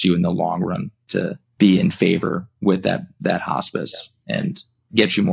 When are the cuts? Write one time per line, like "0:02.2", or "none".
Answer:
none